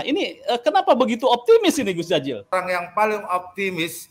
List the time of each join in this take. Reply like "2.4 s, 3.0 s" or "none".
2.5 s